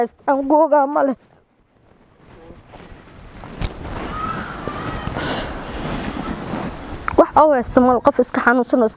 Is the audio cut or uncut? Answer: uncut